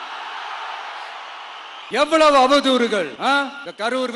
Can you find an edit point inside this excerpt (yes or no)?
no